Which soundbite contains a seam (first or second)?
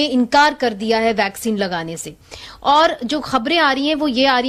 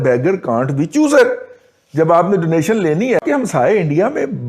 second